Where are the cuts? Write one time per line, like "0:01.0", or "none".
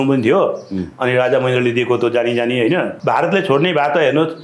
0:03.0

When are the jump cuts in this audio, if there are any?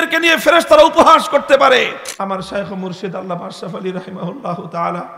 0:02.0

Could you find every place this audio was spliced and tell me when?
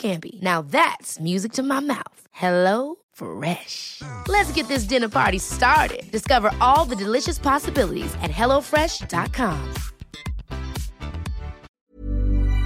0:11.7

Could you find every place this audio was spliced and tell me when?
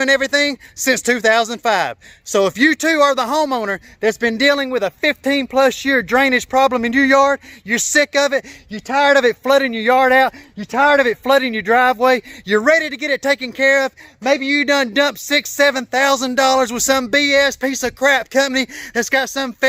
none

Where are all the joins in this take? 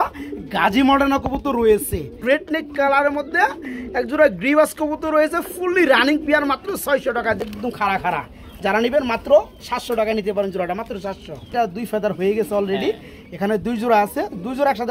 0:02.2
0:07.6
0:11.5

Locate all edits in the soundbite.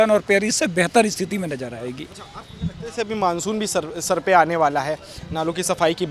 none

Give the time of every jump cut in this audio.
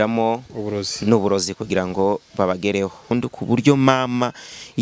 0:03.1

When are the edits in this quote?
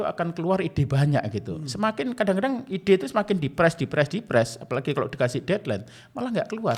none

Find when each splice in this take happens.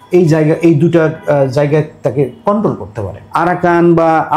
0:03.2

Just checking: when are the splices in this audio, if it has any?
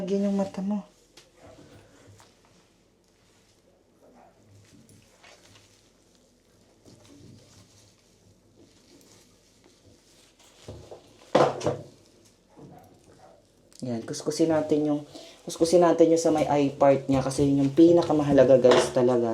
none

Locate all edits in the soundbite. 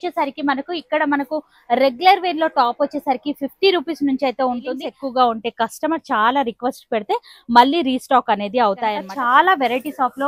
0:04.9
0:09.1

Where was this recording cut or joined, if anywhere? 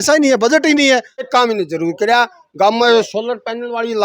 0:01.2

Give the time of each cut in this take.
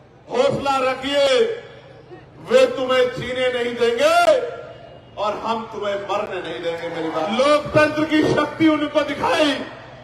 0:07.3

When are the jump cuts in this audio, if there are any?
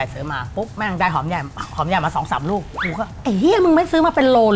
0:03.1

